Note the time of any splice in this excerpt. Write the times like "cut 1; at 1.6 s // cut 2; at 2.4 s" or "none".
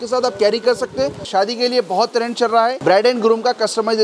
cut 1; at 1.2 s // cut 2; at 2.8 s